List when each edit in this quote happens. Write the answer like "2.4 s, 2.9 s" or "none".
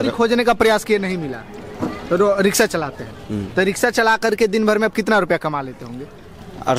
none